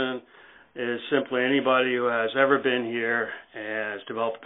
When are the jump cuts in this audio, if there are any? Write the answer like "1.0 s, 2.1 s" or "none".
none